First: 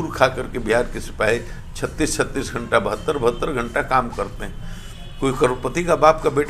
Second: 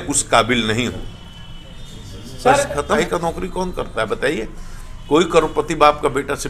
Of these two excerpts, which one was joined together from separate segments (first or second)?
second